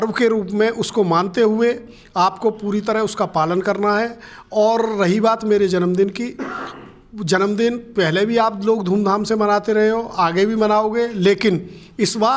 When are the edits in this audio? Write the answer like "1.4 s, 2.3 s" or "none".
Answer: none